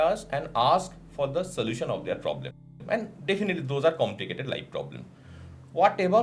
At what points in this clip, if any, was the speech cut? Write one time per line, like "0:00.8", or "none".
none